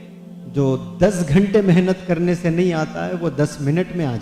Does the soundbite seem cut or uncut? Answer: uncut